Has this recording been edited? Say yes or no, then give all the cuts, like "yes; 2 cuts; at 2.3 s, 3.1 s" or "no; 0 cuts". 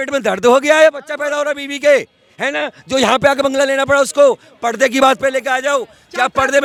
no; 0 cuts